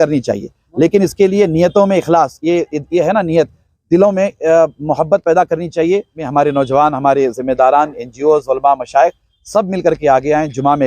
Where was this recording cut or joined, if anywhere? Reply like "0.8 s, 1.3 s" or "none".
6.2 s